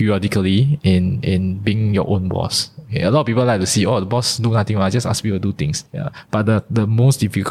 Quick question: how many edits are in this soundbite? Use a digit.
1